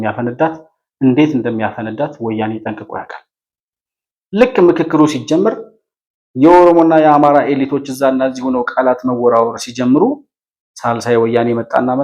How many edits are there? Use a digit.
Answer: 0